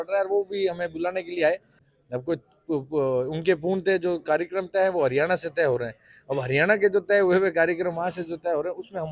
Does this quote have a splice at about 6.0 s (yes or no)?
no